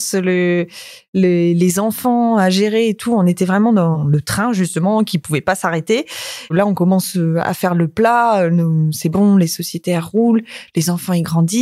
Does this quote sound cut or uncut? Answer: cut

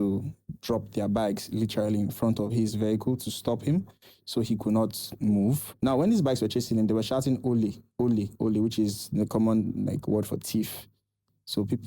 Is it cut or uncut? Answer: cut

